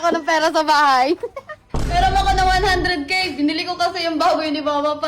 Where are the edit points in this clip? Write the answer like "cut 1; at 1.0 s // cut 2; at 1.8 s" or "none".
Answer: cut 1; at 1.8 s